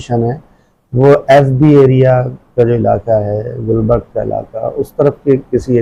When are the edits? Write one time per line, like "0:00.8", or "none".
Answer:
none